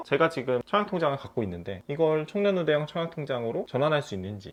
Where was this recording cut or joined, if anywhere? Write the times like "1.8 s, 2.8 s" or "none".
none